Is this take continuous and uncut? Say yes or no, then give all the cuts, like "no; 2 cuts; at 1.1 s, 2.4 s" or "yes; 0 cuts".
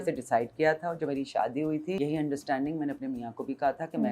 no; 1 cut; at 2.0 s